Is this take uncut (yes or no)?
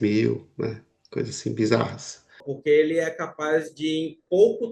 no